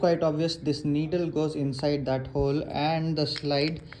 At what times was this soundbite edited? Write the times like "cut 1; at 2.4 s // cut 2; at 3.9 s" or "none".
none